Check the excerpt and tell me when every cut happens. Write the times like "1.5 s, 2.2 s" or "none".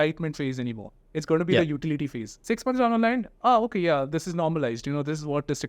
2.3 s